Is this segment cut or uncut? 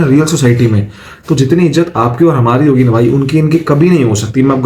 uncut